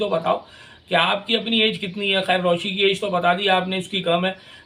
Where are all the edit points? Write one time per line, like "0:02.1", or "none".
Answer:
none